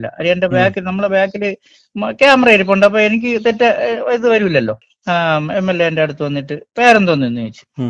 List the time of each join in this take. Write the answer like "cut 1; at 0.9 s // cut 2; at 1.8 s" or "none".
cut 1; at 4.9 s